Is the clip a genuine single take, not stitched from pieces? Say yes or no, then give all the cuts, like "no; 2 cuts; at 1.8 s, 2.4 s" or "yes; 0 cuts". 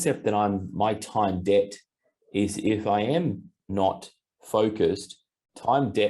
no; 1 cut; at 3.5 s